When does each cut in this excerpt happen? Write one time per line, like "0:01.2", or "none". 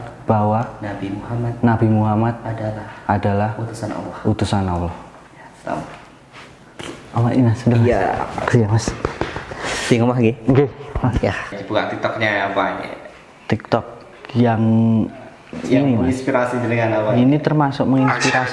0:11.6